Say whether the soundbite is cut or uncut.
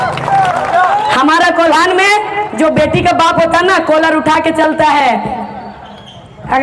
uncut